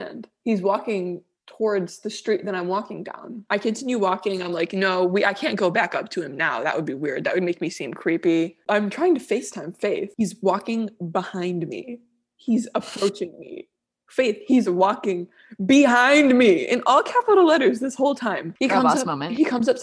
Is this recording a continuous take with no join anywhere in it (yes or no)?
no